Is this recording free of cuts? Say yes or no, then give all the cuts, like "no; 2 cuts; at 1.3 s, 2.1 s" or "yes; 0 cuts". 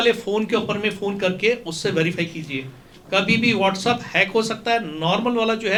yes; 0 cuts